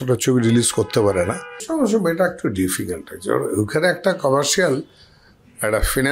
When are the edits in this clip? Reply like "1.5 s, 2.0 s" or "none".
1.5 s